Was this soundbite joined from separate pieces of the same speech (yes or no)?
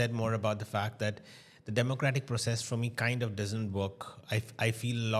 no